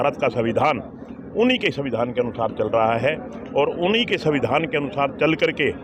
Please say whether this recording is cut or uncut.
uncut